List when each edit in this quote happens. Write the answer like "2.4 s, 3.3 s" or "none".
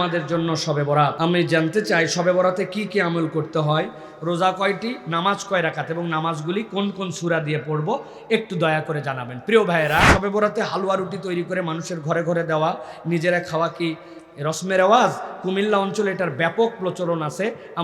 1.1 s, 10.1 s

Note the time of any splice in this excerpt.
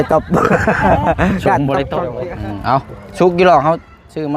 2.1 s

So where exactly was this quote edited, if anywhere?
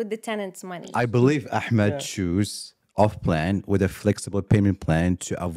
0.9 s

